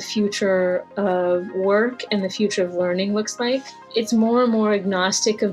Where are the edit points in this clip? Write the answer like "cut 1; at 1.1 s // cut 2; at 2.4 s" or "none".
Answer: cut 1; at 3.9 s